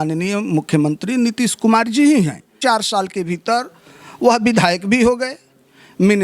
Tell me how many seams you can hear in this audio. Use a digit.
1